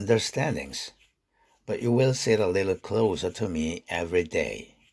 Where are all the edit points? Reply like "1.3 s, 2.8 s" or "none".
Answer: none